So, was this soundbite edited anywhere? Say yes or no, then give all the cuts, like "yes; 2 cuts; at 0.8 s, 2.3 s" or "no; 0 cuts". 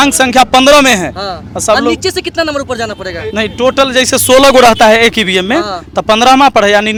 no; 0 cuts